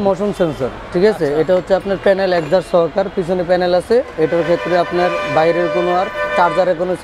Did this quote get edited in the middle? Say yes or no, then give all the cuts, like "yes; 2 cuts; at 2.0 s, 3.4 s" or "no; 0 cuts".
no; 0 cuts